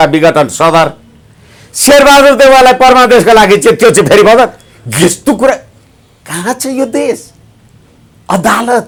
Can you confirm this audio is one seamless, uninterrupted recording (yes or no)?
yes